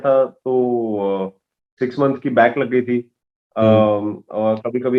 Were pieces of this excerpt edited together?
no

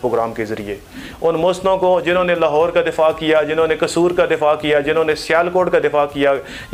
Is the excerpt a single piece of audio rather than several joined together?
yes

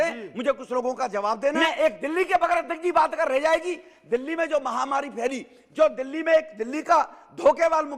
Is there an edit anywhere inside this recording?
yes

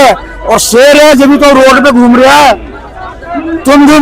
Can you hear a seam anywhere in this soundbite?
no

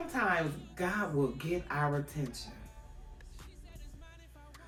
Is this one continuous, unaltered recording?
yes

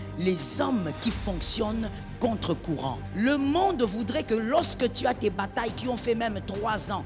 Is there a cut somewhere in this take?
yes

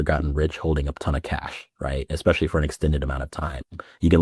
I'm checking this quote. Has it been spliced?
no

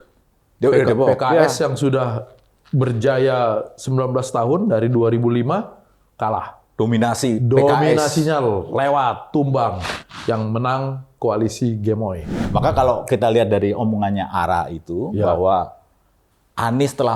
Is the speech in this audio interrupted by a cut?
yes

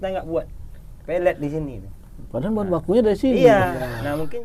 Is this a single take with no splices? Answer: yes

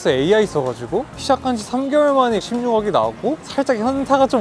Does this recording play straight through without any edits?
no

